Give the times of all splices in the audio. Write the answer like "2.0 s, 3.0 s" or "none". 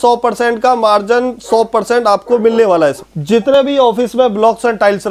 3.4 s